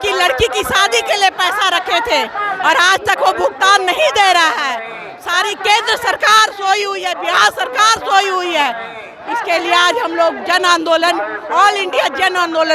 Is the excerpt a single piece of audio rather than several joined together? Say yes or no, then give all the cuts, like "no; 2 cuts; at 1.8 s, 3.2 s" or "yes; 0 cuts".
yes; 0 cuts